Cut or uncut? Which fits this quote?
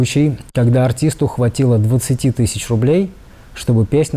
uncut